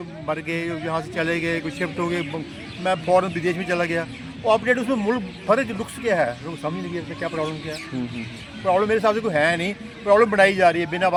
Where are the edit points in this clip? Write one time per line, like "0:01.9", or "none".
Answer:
none